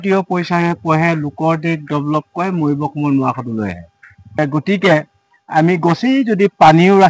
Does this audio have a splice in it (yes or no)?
yes